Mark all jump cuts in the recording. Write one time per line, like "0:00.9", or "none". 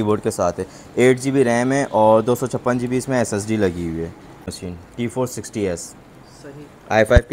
0:04.6